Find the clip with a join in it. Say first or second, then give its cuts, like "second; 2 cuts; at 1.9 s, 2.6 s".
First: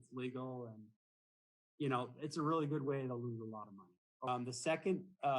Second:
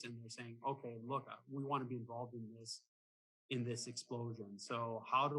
first; 1 cut; at 4.3 s